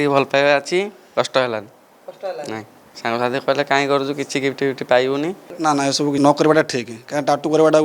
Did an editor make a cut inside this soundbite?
yes; 2 cuts; at 2.9 s, 5.4 s

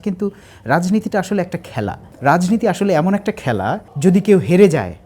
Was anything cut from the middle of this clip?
yes; 2 cuts; at 2.1 s, 3.9 s

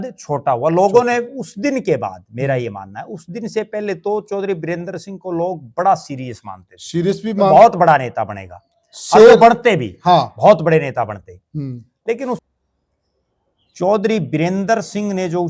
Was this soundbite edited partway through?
yes; 1 cut; at 12.4 s

